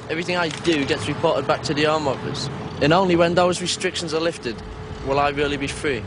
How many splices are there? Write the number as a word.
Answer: one